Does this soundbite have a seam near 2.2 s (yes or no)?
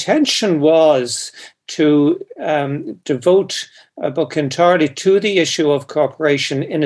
no